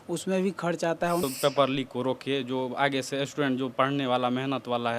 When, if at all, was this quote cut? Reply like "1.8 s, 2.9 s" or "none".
1.2 s